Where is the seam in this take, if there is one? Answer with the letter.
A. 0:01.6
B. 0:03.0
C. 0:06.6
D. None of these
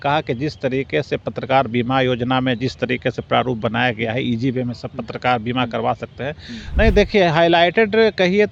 C